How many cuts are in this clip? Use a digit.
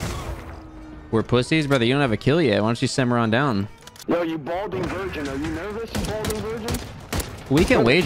1